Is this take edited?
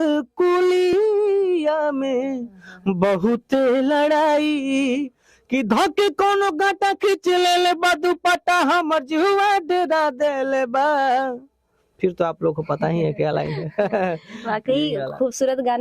no; 0 cuts

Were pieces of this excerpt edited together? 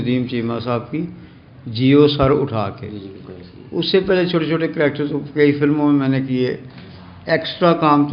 no; 0 cuts

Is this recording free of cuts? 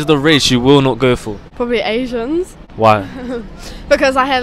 no; 2 cuts; at 1.4 s, 2.6 s

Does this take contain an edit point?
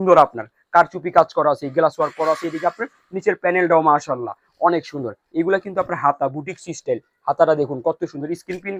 no; 0 cuts

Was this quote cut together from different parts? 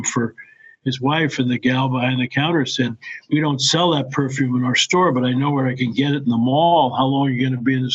no; 0 cuts

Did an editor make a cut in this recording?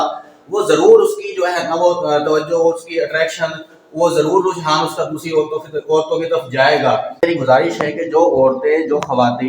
yes; 1 cut; at 7.2 s

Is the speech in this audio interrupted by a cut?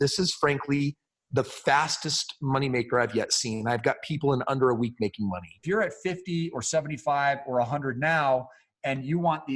yes; 1 cut; at 5.6 s

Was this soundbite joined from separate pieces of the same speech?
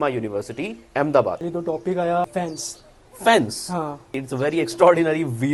yes; 3 cuts; at 1.4 s, 2.3 s, 4.2 s

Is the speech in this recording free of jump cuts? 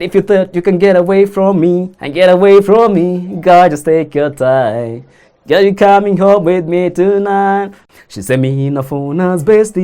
no; 1 cut; at 7.8 s

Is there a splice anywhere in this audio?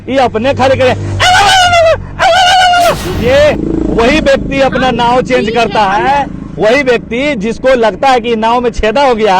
yes; 1 cut; at 3.1 s

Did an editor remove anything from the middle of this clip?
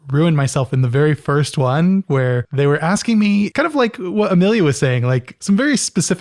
yes; 3 cuts; at 2.1 s, 3.5 s, 5.3 s

